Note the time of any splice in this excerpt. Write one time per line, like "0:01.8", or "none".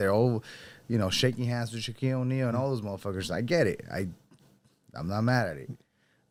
none